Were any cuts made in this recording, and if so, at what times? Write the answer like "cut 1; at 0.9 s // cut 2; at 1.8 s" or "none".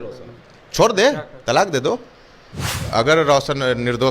cut 1; at 2.7 s